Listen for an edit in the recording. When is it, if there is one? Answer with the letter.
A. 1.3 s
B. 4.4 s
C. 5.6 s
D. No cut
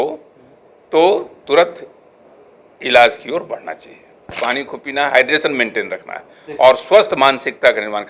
B